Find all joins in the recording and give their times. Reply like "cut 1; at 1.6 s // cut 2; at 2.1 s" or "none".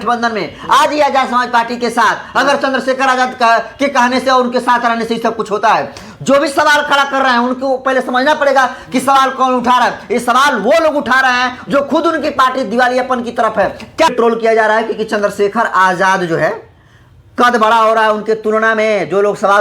cut 1; at 14.1 s